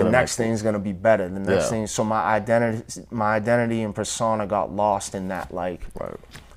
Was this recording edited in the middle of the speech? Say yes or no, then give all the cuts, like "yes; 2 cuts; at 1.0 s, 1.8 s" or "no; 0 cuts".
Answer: no; 0 cuts